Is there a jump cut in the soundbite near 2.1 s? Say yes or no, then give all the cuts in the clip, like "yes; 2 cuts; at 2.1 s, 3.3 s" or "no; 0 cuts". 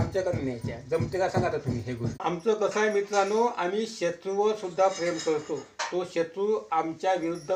yes; 1 cut; at 2.1 s